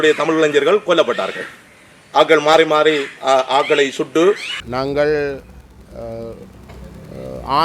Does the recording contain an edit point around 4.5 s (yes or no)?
yes